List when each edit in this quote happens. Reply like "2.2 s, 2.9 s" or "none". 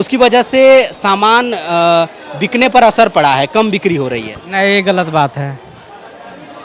none